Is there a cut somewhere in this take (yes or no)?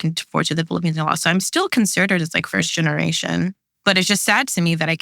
yes